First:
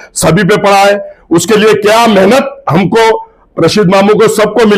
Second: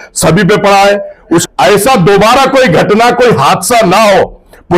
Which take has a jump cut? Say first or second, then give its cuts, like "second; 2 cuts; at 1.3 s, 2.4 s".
second; 1 cut; at 1.4 s